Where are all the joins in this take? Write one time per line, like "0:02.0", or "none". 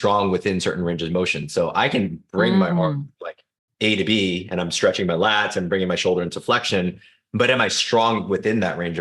none